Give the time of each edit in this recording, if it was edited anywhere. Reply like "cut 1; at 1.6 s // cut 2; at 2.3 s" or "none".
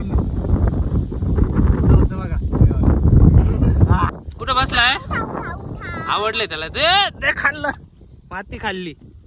cut 1; at 4.1 s